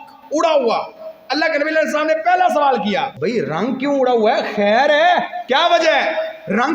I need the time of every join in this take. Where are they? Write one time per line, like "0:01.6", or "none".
0:03.1
0:05.4